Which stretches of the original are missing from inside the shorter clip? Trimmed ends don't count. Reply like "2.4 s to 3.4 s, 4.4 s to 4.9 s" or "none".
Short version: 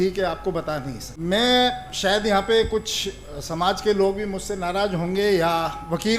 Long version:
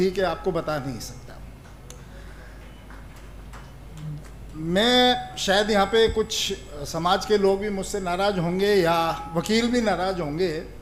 1.0 s to 4.5 s